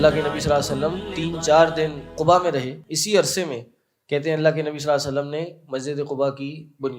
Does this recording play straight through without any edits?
no; 3 cuts; at 1.1 s, 2.1 s, 2.8 s

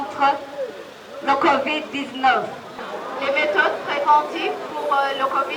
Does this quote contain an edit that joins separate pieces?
yes; 1 cut; at 2.8 s

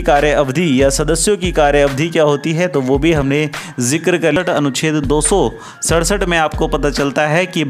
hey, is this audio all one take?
no; 1 cut; at 4.4 s

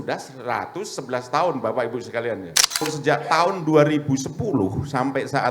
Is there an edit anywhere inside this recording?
yes; 1 cut; at 2.8 s

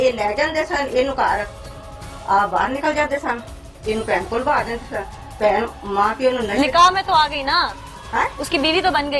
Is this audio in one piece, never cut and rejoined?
yes; 0 cuts

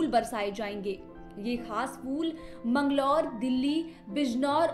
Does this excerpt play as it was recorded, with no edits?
yes; 0 cuts

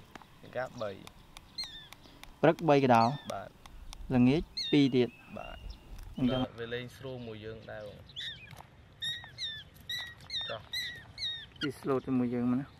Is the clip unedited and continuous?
no; 1 cut; at 6.4 s

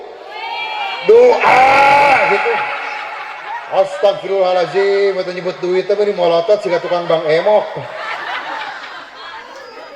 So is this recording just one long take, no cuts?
yes; 0 cuts

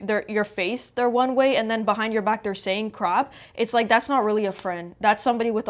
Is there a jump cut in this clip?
no; 0 cuts

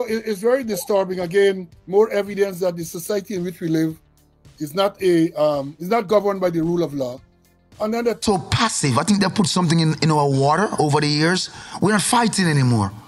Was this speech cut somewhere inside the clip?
yes; 1 cut; at 8.2 s

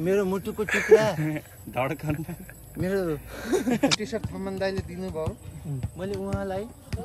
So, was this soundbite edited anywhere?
yes; 1 cut; at 3.9 s

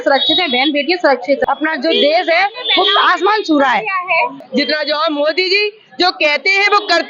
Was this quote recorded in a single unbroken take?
no; 2 cuts; at 1.4 s, 4.4 s

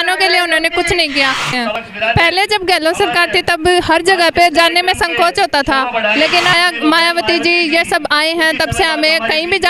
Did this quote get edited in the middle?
yes; 2 cuts; at 1.5 s, 6.5 s

